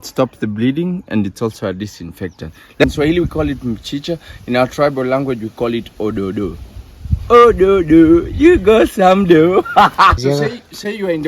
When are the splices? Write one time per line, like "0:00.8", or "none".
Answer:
0:02.8
0:10.2

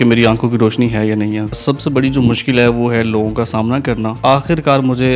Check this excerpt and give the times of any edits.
0:01.6
0:04.2

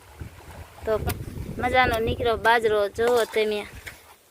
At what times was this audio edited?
0:01.0

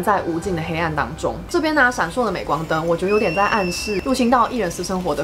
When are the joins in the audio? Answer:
0:01.4

